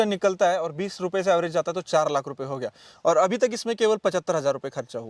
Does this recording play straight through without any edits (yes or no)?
yes